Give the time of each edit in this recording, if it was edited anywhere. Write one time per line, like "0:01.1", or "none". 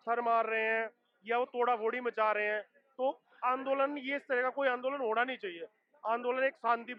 none